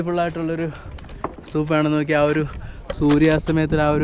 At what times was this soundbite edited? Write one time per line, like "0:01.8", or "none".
none